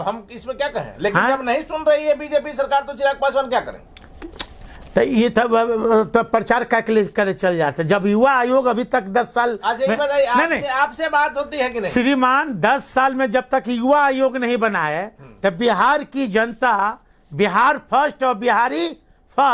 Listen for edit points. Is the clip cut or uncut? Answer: uncut